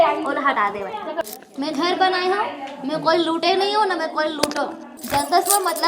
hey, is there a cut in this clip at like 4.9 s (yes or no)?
yes